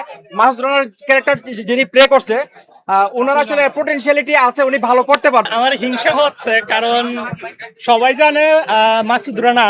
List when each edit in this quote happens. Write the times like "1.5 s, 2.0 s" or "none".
5.5 s